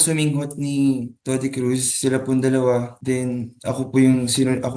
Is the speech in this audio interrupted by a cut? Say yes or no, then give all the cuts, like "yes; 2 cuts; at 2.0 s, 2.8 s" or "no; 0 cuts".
yes; 2 cuts; at 1.1 s, 2.9 s